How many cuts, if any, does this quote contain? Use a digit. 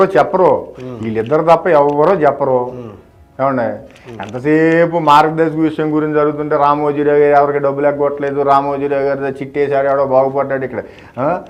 0